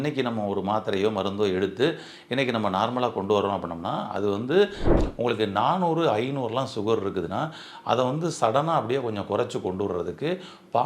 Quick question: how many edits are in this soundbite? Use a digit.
1